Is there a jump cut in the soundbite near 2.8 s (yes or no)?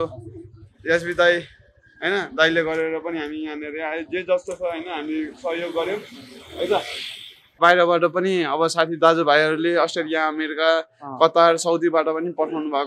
no